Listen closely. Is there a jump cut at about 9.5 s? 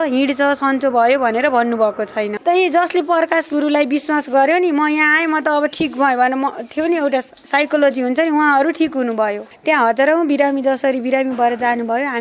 yes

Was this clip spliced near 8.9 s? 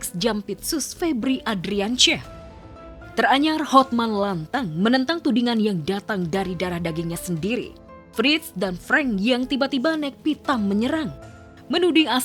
no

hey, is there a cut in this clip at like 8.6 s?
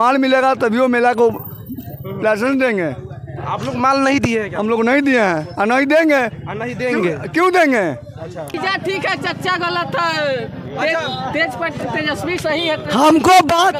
yes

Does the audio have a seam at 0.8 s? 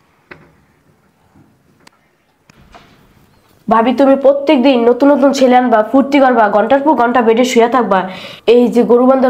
yes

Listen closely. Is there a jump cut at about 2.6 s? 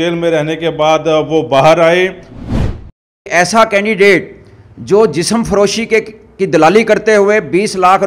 yes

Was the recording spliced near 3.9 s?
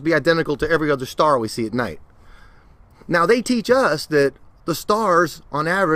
no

